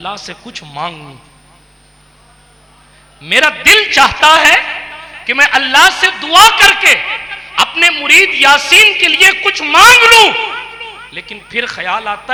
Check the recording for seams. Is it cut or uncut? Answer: uncut